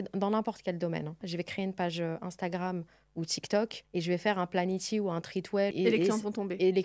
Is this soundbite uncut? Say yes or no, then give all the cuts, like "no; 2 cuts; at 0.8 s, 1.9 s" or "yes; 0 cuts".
no; 3 cuts; at 1.2 s, 3.8 s, 5.7 s